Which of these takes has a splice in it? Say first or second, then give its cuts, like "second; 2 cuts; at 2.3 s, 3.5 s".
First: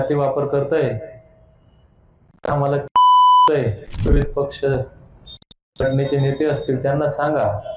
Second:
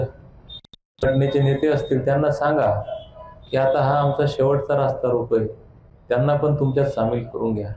first; 1 cut; at 3.9 s